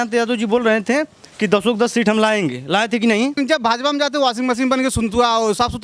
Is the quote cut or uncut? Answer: cut